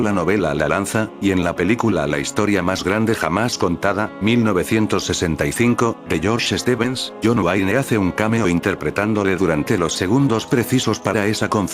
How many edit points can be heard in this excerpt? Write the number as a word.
zero